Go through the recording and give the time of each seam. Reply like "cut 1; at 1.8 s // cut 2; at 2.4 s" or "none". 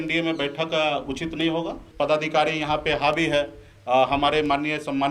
cut 1; at 1.8 s